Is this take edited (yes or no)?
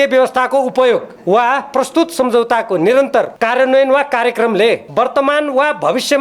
yes